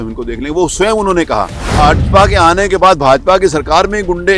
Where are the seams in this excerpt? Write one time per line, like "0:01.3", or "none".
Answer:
0:01.7